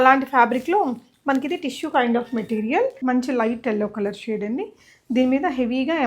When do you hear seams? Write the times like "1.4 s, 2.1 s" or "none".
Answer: 3.0 s